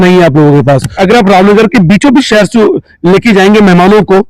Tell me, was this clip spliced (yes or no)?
yes